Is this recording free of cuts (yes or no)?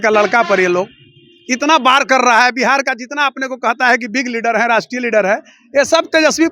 yes